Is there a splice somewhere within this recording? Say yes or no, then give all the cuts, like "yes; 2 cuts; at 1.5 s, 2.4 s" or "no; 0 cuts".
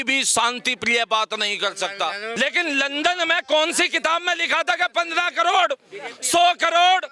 yes; 1 cut; at 2.3 s